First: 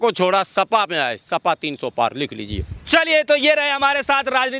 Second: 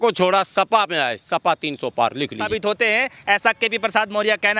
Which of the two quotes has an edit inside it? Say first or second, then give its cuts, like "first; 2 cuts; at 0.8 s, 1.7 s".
second; 1 cut; at 2.4 s